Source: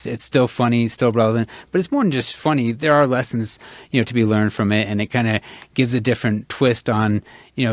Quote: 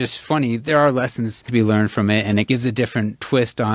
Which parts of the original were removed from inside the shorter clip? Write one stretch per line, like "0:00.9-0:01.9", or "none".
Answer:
0:03.6-0:04.1
0:05.1-0:05.7